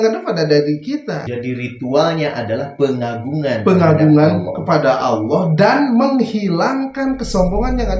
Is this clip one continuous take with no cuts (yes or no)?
no